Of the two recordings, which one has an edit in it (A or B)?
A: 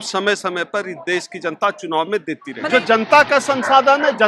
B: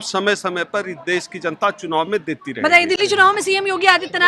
A